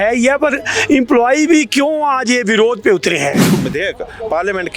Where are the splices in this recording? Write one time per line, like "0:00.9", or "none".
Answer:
0:03.5